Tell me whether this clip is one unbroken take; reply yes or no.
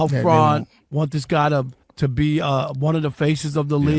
no